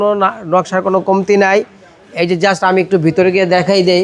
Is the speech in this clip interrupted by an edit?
no; 0 cuts

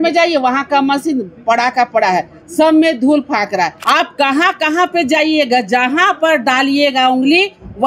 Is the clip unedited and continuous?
no; 1 cut; at 3.8 s

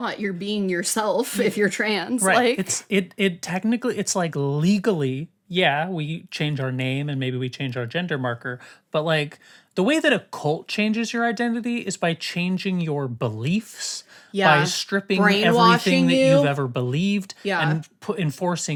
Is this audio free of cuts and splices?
yes; 0 cuts

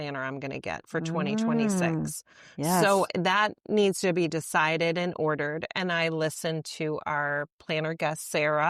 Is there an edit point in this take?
no; 0 cuts

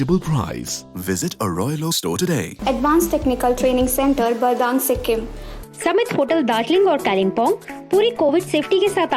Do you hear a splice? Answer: yes; 2 cuts; at 2.5 s, 5.5 s

